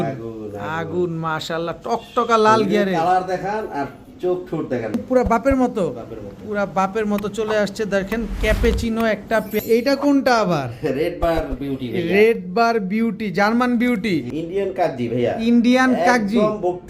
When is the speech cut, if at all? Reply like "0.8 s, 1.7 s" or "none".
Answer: 5.0 s, 9.6 s, 14.3 s